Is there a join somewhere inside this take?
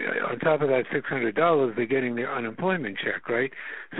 no; 0 cuts

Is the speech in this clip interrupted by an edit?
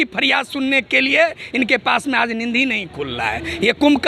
no; 0 cuts

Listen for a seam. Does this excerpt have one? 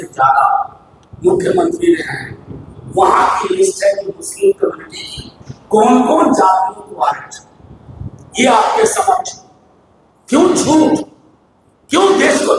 no; 0 cuts

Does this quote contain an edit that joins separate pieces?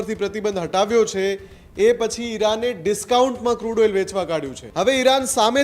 yes; 1 cut; at 4.6 s

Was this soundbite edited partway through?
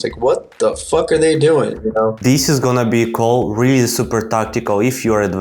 yes; 1 cut; at 2.2 s

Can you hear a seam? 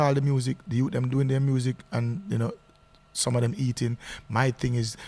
no; 0 cuts

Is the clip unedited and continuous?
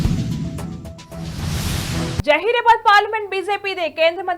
no; 1 cut; at 2.2 s

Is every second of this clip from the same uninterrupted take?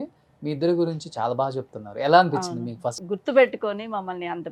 no; 1 cut; at 3.0 s

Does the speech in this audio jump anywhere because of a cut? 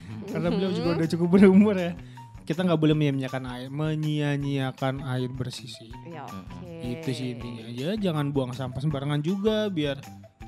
no; 0 cuts

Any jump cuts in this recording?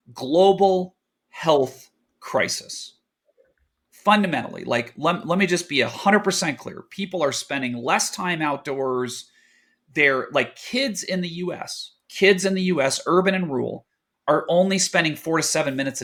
no; 0 cuts

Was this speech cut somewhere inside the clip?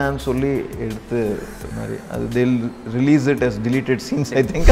no; 0 cuts

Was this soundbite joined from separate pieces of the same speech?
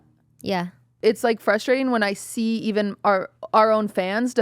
yes; 1 cut; at 0.9 s

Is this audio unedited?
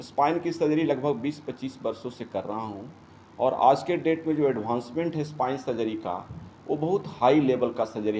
yes; 0 cuts

